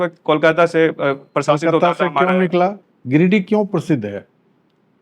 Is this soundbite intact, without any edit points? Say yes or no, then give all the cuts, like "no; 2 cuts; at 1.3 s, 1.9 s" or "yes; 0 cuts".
no; 1 cut; at 2.8 s